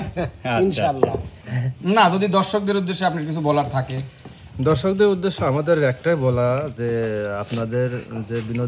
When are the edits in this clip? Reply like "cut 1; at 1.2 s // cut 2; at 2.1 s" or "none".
cut 1; at 1.3 s